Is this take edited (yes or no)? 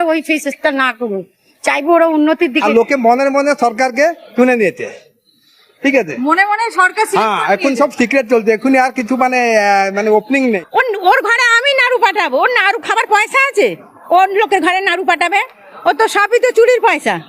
yes